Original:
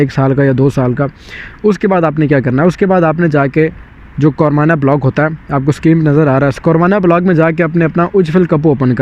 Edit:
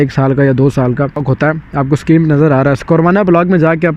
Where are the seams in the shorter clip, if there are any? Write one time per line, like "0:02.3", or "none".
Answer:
0:01.3